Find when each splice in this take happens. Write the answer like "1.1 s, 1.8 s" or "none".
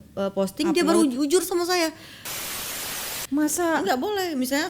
2.6 s